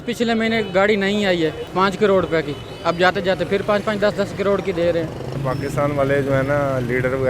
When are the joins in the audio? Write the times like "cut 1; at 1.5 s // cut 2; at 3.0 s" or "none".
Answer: cut 1; at 1.6 s // cut 2; at 5.4 s